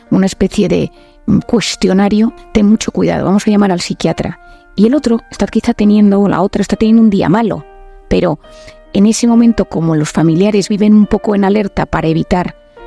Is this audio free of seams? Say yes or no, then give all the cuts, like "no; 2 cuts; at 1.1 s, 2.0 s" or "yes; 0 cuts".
no; 1 cut; at 2.4 s